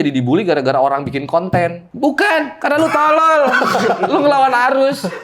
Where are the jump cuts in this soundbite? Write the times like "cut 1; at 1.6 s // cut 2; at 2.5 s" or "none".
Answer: cut 1; at 1.8 s